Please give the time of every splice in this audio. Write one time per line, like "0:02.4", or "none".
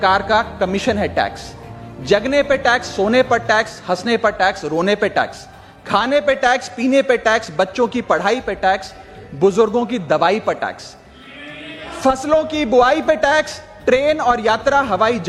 none